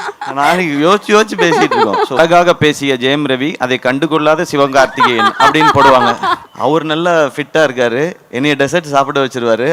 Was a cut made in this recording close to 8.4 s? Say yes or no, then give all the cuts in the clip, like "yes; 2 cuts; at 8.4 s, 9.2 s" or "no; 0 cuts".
no; 2 cuts; at 2.2 s, 6.5 s